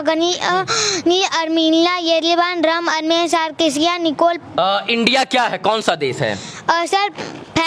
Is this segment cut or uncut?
cut